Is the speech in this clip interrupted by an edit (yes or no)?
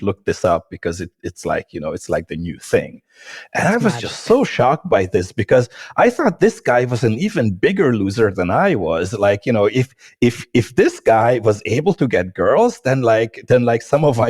no